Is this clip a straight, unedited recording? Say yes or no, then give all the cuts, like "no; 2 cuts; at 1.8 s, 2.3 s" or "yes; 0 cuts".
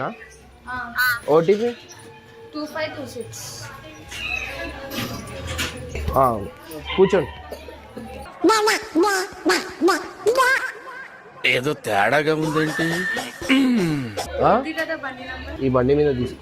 no; 1 cut; at 15.5 s